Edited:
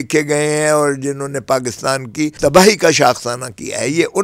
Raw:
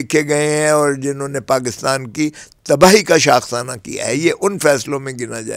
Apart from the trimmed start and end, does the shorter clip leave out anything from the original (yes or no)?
yes